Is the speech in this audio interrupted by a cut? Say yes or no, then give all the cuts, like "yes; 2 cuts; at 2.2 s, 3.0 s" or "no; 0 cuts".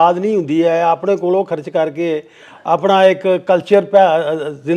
no; 0 cuts